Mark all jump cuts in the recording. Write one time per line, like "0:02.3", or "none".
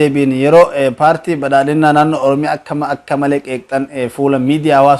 none